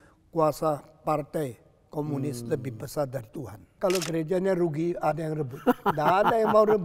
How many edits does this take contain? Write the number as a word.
one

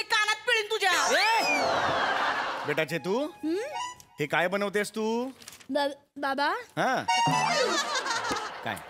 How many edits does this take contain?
one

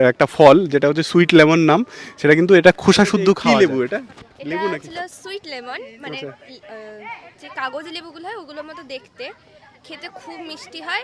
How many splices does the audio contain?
one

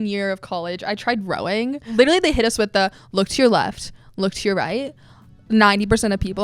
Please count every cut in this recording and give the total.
one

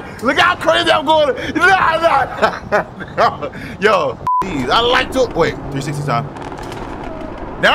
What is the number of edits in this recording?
one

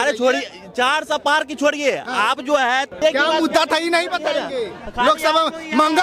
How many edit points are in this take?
one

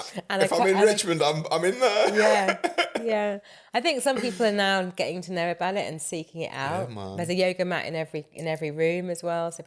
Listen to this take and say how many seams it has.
zero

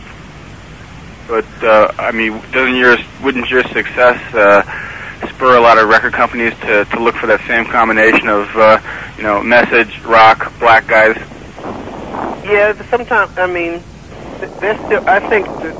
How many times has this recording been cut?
one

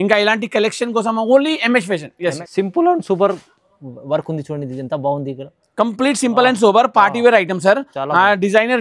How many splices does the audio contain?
one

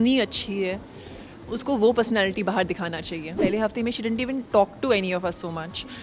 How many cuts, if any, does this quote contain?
one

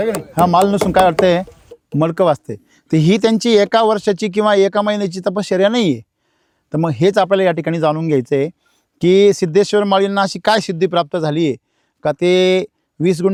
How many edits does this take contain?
zero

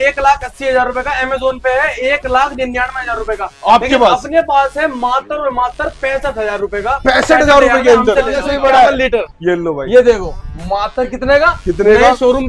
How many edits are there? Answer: one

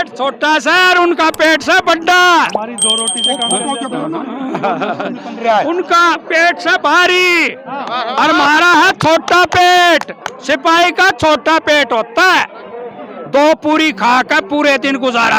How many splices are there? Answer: zero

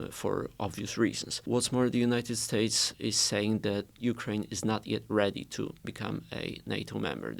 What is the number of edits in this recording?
three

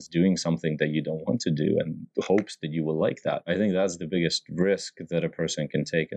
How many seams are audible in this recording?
one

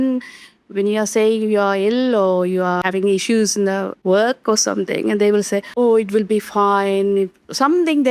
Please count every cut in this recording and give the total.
three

